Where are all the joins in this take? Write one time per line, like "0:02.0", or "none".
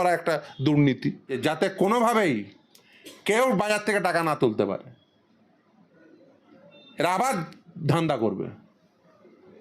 0:01.4